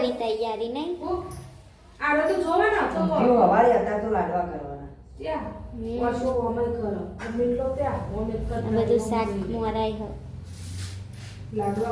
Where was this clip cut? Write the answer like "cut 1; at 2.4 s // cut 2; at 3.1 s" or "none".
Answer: none